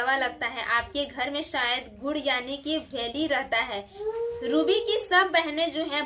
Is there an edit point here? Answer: yes; 1 cut; at 3.9 s

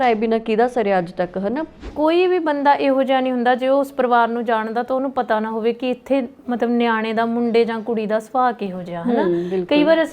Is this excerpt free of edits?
no; 1 cut; at 1.9 s

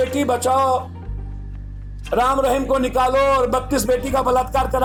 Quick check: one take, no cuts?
yes; 0 cuts

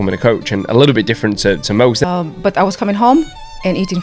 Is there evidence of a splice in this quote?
yes; 1 cut; at 2.0 s

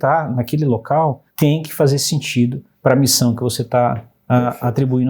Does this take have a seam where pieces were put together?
yes; 2 cuts; at 1.2 s, 2.7 s

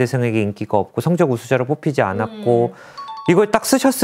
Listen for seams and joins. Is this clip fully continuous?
yes; 0 cuts

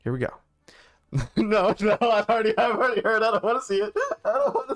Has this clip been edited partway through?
no; 0 cuts

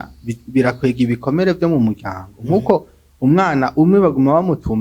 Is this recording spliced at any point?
no; 0 cuts

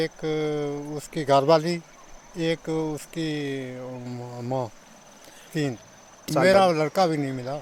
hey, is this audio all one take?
no; 1 cut; at 6.3 s

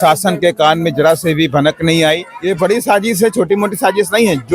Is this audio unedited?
no; 1 cut; at 2.3 s

